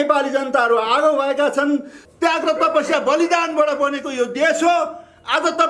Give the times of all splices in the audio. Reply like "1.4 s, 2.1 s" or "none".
2.0 s